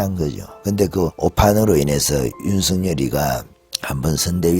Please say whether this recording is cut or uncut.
cut